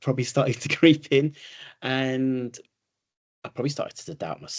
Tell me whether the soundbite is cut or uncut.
uncut